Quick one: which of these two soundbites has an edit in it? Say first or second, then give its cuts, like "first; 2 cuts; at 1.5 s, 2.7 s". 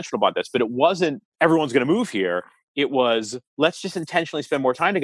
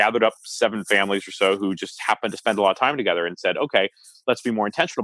first; 2 cuts; at 1.2 s, 3.4 s